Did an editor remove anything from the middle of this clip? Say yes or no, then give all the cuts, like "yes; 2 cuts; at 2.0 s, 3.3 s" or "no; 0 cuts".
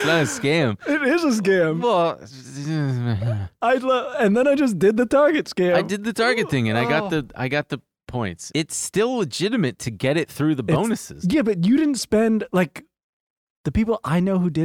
yes; 2 cuts; at 8.5 s, 11.1 s